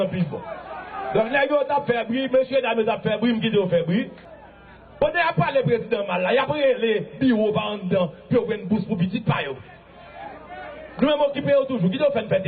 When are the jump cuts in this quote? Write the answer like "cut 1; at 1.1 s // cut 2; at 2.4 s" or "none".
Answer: cut 1; at 4.1 s